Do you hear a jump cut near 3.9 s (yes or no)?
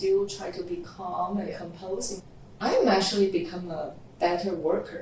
no